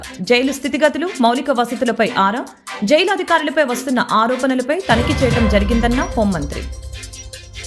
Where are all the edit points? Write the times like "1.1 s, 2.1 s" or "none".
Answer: 6.4 s